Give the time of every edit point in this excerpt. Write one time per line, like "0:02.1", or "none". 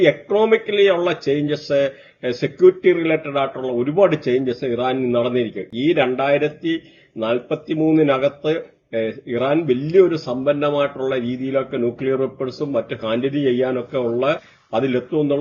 none